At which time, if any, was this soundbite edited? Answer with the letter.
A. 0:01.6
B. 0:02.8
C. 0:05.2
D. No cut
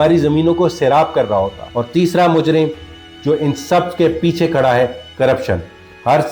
A